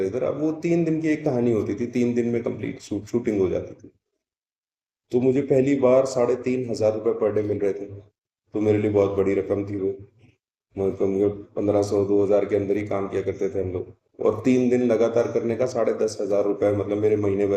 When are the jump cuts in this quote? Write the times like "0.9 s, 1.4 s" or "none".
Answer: none